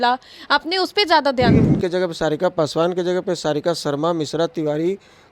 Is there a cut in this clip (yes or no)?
yes